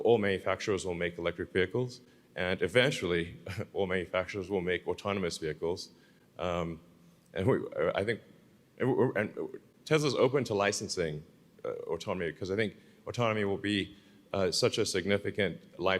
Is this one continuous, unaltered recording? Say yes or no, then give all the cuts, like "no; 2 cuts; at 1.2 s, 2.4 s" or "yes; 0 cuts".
yes; 0 cuts